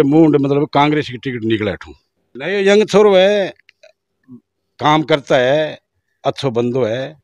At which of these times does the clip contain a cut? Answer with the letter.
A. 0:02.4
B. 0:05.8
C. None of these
A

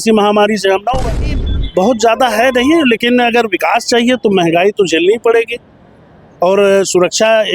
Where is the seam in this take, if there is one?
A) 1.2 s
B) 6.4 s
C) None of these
A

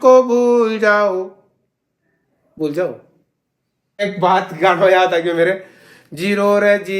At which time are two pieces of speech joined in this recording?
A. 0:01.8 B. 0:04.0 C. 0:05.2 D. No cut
B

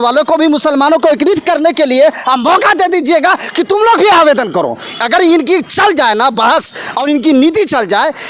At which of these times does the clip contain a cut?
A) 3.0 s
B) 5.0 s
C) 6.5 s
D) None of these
D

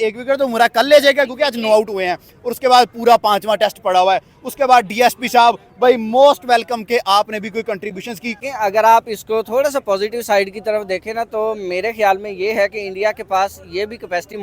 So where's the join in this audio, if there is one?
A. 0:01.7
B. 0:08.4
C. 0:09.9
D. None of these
B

